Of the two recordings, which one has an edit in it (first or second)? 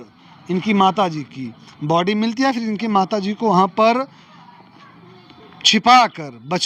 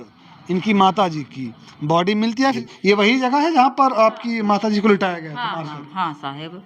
second